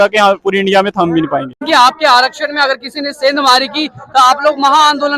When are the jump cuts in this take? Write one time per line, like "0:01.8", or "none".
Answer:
0:01.6